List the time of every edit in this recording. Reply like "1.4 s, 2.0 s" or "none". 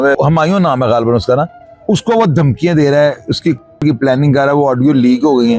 none